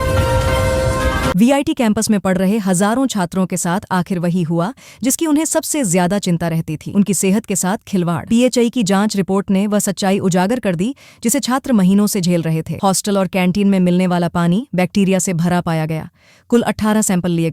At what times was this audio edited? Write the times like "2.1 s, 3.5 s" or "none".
1.3 s